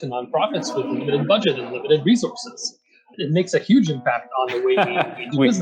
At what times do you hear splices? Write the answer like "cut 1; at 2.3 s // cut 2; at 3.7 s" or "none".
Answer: cut 1; at 3.1 s